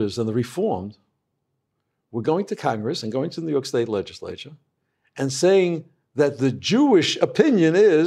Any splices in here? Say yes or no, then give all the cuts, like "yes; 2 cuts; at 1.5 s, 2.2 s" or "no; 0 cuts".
no; 0 cuts